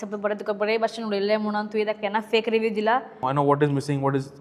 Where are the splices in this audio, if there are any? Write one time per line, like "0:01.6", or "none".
0:03.2